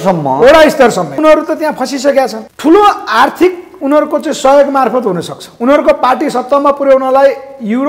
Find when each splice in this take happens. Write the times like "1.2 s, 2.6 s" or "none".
1.2 s, 2.4 s